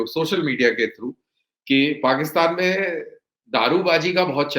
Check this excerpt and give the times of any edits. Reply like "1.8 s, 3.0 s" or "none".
none